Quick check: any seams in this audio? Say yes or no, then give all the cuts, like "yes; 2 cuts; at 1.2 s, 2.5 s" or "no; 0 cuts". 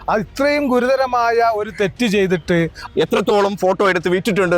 yes; 1 cut; at 2.8 s